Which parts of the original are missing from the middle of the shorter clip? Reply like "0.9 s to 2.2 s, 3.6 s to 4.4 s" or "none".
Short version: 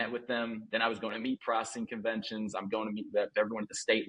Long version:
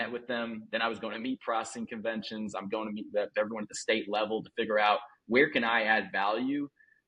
none